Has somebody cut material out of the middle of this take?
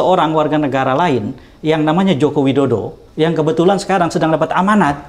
yes; 1 cut; at 3.0 s

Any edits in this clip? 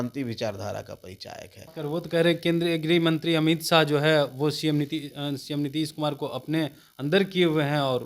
yes; 1 cut; at 1.7 s

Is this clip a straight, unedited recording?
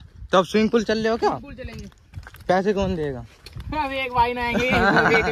yes; 0 cuts

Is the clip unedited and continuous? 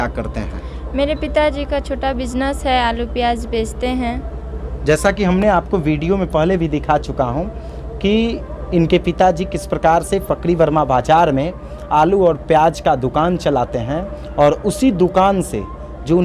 yes; 0 cuts

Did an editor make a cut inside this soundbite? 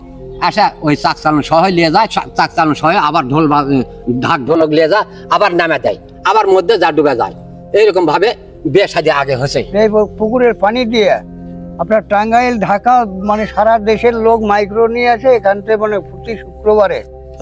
yes; 1 cut; at 9.6 s

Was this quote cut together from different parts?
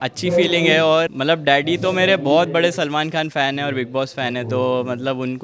yes; 1 cut; at 1.1 s

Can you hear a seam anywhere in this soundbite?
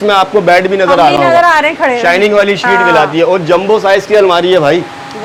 no; 0 cuts

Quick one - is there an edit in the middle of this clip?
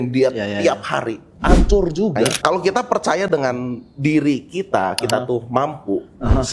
yes; 1 cut; at 2.4 s

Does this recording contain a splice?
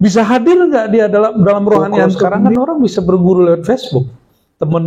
yes; 1 cut; at 2.5 s

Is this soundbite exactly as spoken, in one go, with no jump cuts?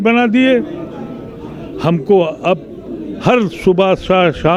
yes; 0 cuts

